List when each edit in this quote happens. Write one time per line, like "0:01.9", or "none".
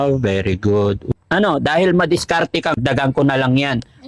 0:01.1
0:02.7